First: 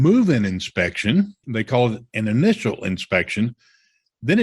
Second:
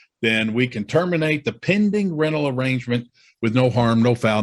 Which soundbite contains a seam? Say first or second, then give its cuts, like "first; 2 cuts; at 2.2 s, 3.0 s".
first; 1 cut; at 1.4 s